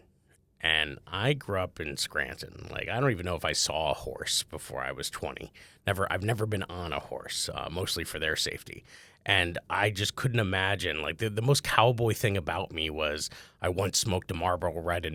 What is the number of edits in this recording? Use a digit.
0